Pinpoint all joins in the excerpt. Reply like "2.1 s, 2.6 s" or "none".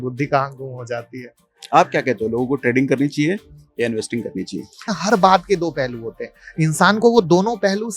4.9 s